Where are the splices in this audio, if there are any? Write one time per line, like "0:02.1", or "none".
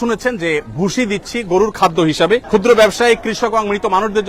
0:02.4